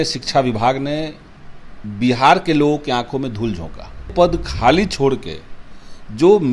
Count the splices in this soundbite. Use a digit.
1